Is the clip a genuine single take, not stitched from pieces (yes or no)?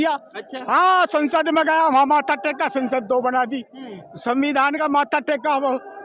yes